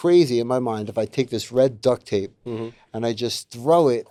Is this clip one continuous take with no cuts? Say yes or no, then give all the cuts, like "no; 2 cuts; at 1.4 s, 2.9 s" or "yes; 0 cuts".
yes; 0 cuts